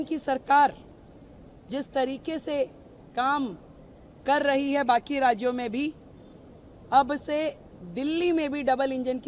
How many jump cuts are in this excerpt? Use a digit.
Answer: 0